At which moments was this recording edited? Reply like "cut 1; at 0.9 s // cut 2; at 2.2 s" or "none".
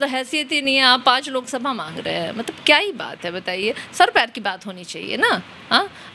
none